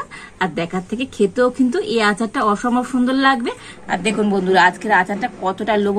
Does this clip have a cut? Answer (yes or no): yes